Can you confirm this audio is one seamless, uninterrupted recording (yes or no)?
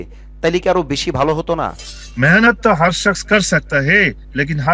no